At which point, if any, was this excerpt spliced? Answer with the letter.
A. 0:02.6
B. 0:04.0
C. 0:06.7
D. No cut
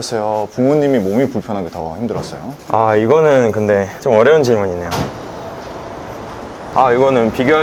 D